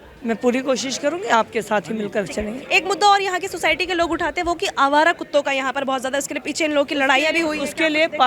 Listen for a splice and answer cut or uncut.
uncut